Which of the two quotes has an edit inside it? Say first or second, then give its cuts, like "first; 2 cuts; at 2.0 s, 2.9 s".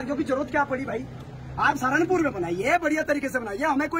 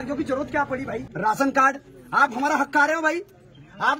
second; 1 cut; at 1.1 s